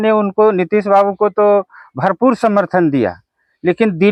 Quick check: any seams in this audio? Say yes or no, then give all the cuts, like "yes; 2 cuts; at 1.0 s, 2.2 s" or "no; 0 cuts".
no; 0 cuts